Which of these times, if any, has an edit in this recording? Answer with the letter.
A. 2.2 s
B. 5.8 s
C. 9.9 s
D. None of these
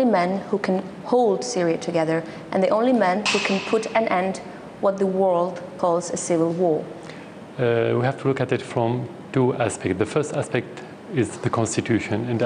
D